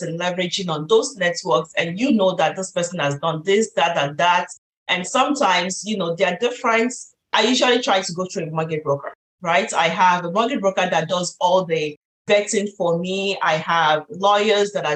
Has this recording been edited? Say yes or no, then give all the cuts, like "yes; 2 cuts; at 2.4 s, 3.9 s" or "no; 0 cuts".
no; 0 cuts